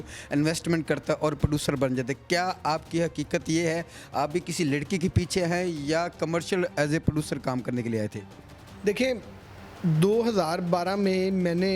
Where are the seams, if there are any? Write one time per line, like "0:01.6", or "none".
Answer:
none

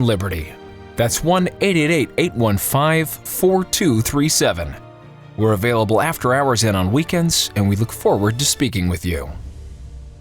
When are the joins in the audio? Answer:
0:09.3

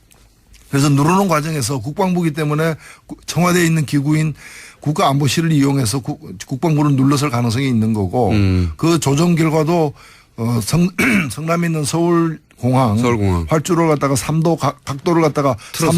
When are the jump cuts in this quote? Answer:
0:01.5

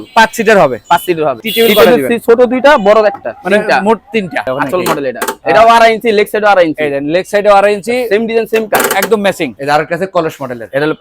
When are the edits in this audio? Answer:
0:01.4
0:04.5
0:09.6

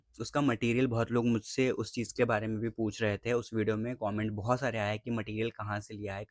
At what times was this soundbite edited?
none

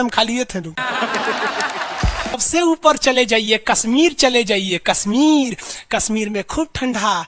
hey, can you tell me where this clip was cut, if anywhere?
0:02.4

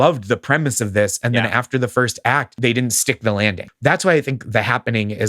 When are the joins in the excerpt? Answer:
0:02.5

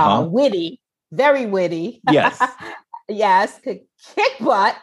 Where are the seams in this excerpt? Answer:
0:03.6

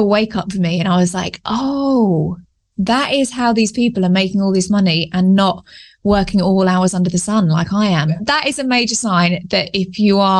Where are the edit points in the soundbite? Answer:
0:08.2

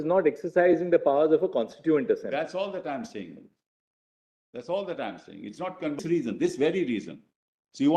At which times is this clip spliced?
0:06.0

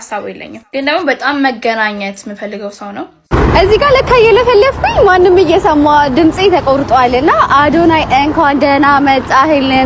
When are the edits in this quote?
0:03.1

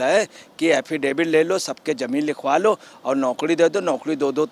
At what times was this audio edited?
none

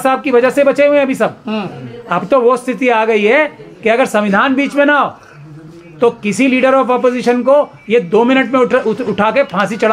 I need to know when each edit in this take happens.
none

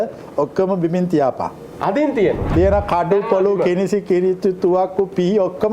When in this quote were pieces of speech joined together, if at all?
0:01.6
0:02.5

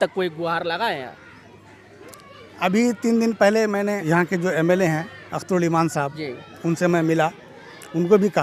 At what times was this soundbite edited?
none

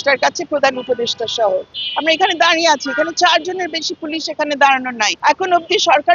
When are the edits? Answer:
0:01.7
0:05.1

